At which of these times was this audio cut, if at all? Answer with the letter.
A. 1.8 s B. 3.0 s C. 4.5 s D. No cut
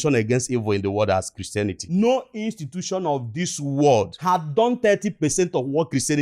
A